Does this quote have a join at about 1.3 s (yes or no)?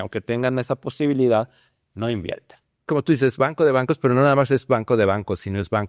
no